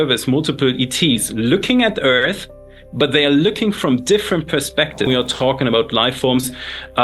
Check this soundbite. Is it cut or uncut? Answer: cut